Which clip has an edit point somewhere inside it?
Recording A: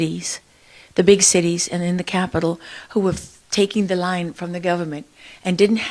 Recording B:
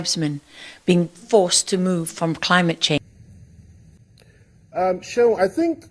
B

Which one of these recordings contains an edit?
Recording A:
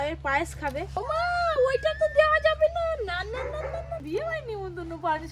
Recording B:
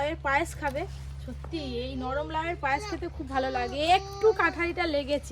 A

